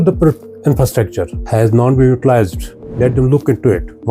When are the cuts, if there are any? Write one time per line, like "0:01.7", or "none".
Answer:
0:01.4